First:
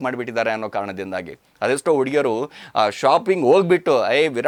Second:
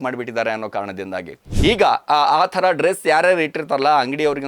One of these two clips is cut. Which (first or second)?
second